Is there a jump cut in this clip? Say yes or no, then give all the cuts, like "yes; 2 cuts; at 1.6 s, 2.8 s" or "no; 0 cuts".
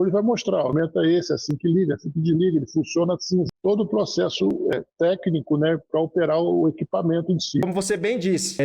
no; 0 cuts